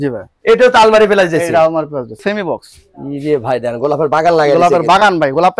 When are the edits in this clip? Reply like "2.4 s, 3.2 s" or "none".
2.2 s

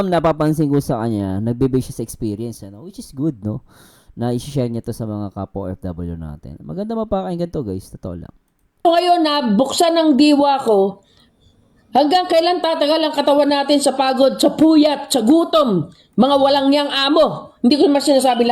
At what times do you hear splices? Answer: none

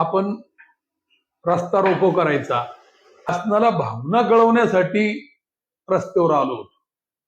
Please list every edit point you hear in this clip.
3.3 s

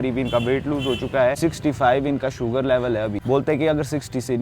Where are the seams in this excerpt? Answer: 1.4 s, 3.2 s

